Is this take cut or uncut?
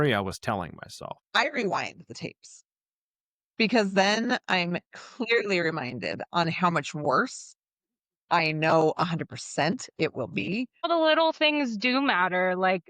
cut